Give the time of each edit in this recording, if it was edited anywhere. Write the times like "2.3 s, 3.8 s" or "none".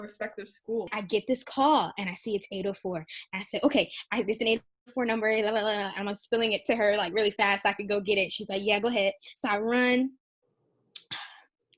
1.0 s